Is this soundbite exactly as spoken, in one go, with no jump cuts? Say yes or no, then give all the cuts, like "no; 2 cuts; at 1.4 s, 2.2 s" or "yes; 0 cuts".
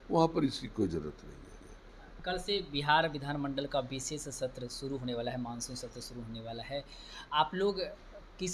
yes; 0 cuts